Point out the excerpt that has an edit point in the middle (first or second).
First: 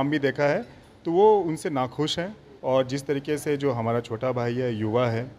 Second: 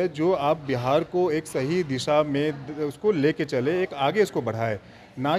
first